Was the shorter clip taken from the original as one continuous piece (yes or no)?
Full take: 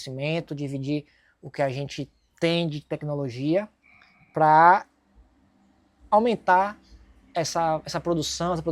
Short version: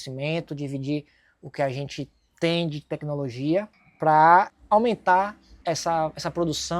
no